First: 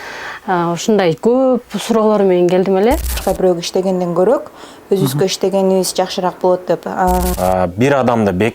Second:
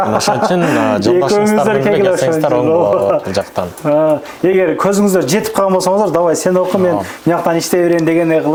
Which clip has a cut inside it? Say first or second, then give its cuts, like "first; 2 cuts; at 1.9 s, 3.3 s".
first; 2 cuts; at 3.2 s, 7.3 s